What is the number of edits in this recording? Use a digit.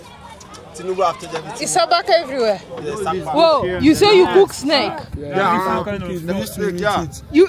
1